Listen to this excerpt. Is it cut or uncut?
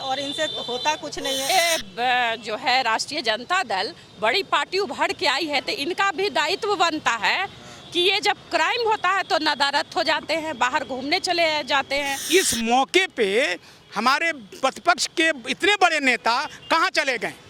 cut